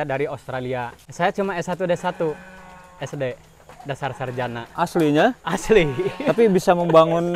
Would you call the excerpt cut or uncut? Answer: cut